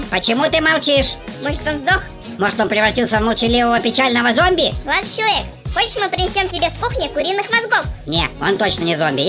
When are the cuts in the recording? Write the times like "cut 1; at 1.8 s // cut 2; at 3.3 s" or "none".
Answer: none